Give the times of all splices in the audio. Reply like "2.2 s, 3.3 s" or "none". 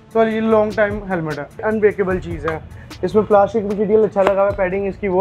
1.6 s